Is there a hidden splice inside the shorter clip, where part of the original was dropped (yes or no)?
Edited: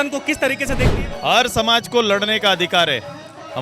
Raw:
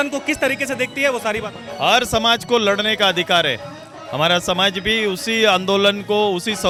yes